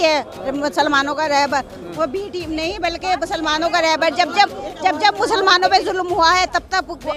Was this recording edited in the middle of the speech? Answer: no; 0 cuts

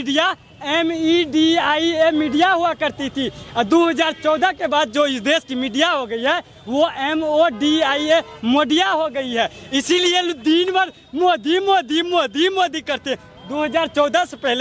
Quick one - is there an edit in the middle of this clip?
no; 0 cuts

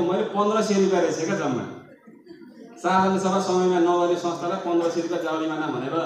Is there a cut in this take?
no; 0 cuts

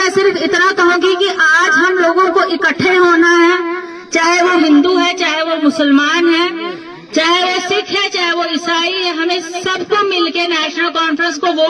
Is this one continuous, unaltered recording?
yes; 0 cuts

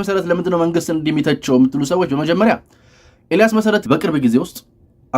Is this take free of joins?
no; 1 cut; at 3.8 s

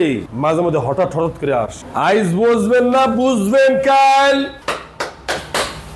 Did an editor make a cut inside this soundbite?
yes; 1 cut; at 1.8 s

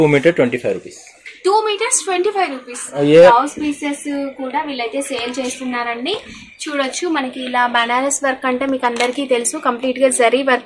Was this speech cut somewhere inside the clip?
yes; 1 cut; at 3.3 s

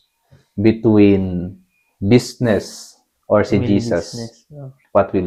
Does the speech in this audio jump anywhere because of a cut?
no; 0 cuts

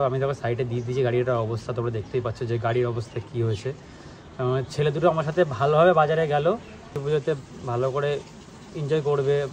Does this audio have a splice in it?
no; 0 cuts

